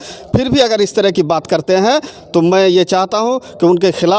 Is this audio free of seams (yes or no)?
yes